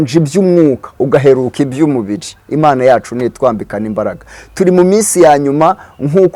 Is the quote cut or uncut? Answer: uncut